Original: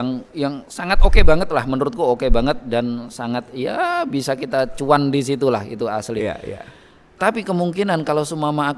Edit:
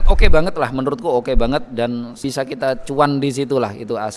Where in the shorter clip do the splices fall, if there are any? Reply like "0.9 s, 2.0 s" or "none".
2.2 s